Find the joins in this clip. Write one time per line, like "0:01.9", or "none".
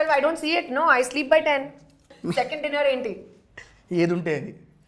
0:02.1